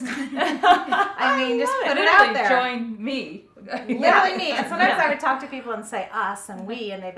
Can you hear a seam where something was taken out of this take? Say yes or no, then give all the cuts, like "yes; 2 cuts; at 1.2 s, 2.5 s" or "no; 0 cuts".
no; 0 cuts